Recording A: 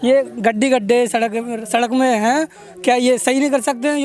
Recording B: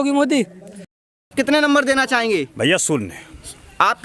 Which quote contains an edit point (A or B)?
B